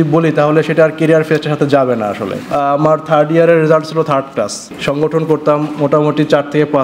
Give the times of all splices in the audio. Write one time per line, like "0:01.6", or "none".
0:02.5
0:04.7